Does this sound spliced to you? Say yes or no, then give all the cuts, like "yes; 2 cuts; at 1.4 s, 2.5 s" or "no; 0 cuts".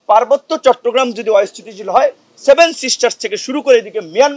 no; 0 cuts